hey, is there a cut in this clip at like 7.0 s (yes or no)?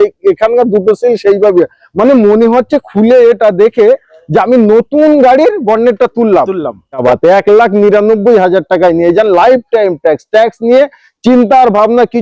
yes